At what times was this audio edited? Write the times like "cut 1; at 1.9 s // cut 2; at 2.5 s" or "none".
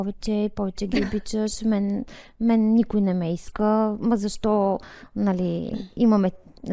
none